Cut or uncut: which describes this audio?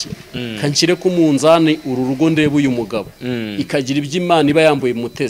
uncut